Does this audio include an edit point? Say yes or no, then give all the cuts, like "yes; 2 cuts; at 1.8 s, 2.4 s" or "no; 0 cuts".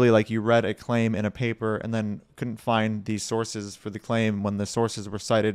no; 0 cuts